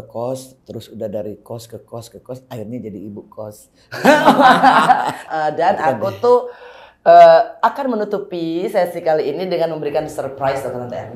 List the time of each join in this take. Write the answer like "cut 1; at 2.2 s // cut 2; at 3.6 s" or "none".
cut 1; at 5.2 s